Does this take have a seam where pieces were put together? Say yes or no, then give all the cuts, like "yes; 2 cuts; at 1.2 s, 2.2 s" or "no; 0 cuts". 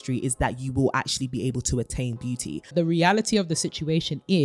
yes; 1 cut; at 2.7 s